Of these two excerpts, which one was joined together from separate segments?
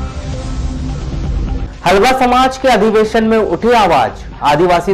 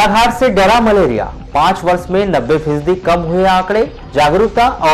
first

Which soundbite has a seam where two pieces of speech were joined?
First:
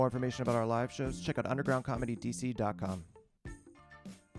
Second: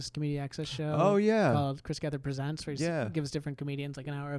first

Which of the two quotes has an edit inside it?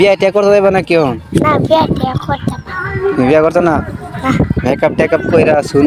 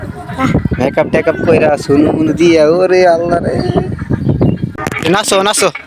second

